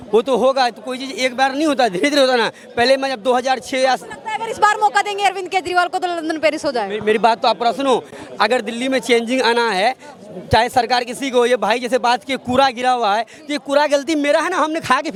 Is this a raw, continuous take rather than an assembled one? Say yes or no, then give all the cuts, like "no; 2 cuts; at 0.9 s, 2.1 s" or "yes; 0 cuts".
yes; 0 cuts